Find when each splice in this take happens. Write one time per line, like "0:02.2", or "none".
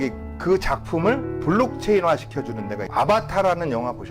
0:02.8